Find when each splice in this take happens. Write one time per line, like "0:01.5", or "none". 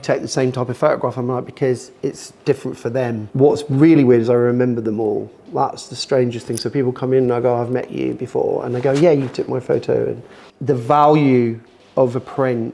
0:03.2
0:10.5